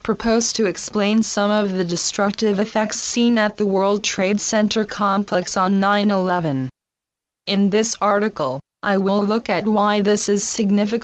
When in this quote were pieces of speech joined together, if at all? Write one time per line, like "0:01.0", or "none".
0:09.8